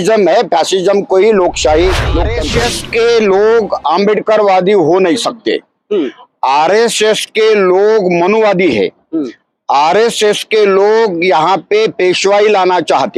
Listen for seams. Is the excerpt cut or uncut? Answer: cut